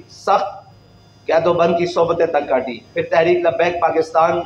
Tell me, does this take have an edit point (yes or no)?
no